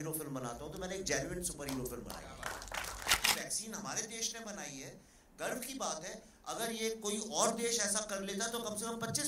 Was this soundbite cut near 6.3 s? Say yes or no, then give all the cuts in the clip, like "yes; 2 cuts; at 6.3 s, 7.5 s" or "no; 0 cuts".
no; 1 cut; at 3.2 s